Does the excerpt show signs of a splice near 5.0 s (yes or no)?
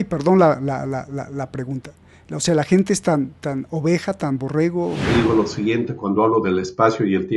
yes